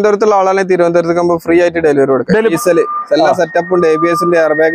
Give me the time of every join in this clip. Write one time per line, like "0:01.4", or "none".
0:02.5